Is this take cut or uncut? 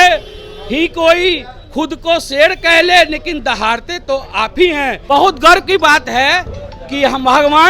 cut